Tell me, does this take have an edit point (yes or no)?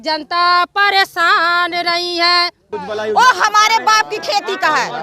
yes